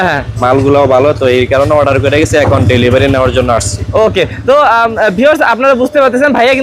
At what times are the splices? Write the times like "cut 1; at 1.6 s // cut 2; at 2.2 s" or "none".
none